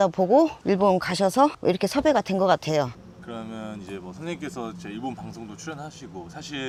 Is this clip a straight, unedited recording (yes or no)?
yes